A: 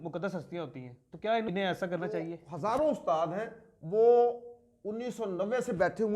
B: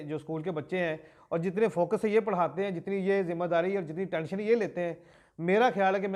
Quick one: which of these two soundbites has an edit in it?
A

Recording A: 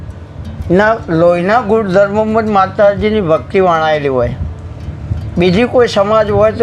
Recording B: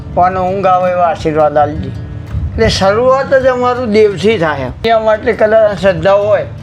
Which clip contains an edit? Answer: B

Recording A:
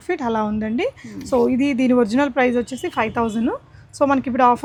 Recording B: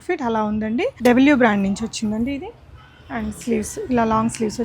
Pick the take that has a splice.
B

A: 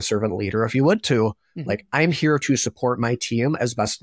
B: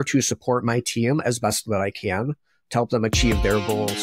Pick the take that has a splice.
B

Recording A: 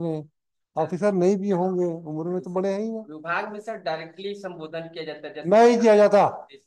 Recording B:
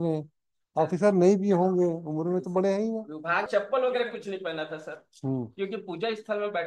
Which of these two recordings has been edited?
B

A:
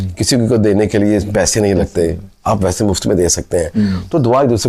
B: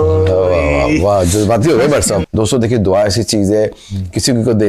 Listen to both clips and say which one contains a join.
B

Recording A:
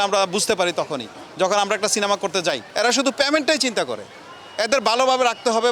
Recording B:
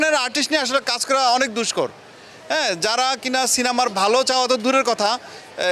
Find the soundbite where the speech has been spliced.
A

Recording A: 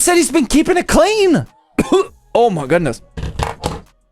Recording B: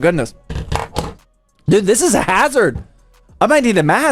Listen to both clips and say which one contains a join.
A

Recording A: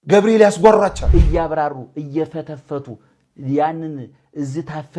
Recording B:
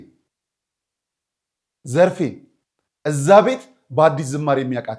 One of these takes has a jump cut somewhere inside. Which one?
A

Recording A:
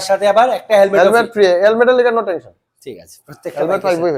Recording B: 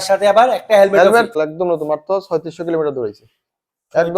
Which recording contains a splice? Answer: B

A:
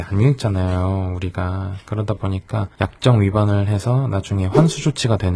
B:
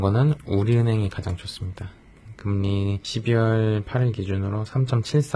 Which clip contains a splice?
B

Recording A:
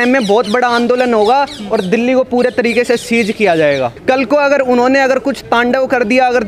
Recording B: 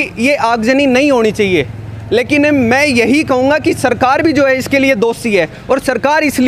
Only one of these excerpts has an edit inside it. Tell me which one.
A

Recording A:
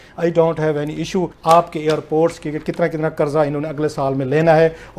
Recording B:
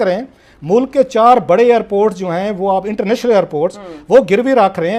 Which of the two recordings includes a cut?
A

